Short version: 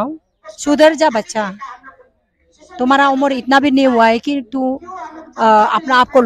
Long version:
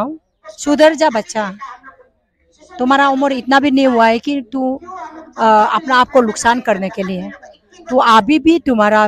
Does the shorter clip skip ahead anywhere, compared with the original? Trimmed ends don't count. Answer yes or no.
no